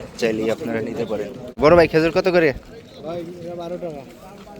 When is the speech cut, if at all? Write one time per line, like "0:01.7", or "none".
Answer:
0:01.5

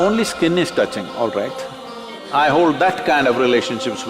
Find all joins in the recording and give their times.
0:02.2

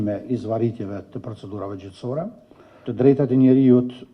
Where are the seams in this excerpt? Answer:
0:02.8

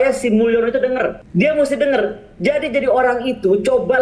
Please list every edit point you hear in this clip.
0:01.2

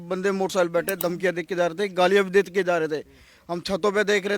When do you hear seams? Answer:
none

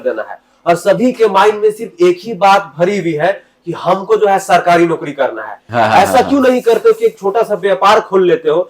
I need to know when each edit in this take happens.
0:05.6

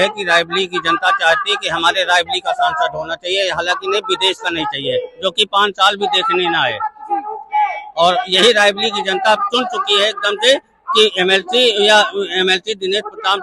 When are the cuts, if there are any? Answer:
none

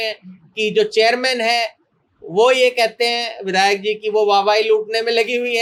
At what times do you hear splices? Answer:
none

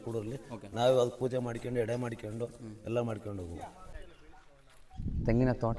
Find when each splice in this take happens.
0:03.9

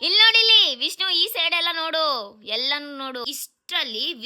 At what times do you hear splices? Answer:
0:03.2

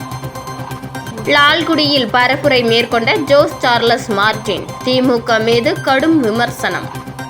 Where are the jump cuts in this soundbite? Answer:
none

